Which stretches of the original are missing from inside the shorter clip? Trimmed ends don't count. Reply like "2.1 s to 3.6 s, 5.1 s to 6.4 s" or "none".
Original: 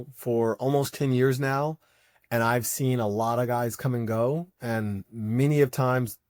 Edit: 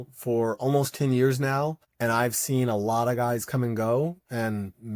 1.8 s to 2.2 s